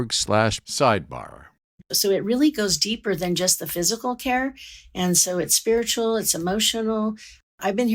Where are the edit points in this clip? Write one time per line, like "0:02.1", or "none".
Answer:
0:01.6